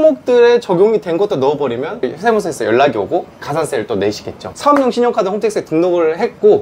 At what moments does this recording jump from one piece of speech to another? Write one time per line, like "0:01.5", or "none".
0:02.0
0:04.3